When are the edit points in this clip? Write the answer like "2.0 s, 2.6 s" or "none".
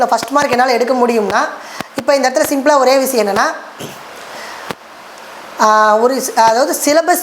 none